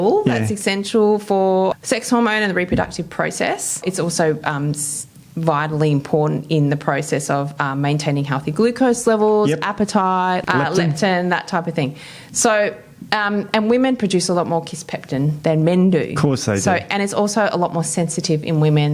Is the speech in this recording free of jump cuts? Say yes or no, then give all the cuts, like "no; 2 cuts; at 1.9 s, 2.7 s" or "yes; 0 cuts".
no; 3 cuts; at 1.8 s, 3.8 s, 10.4 s